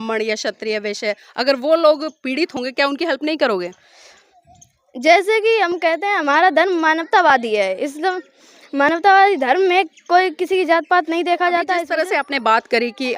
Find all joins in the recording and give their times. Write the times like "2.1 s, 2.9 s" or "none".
11.9 s